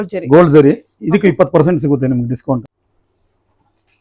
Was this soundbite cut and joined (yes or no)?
yes